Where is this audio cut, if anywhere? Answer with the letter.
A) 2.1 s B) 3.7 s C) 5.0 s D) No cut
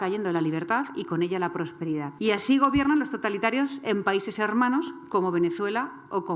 A